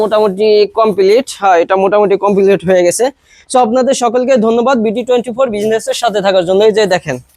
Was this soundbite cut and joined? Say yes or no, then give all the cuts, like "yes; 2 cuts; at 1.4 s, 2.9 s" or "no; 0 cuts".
no; 0 cuts